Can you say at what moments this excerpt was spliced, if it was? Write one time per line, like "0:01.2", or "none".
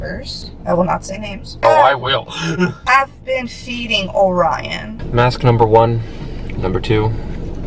0:04.9